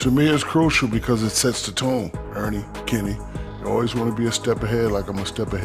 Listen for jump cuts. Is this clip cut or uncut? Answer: uncut